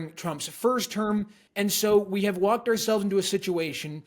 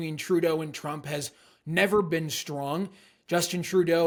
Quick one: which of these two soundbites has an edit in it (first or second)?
first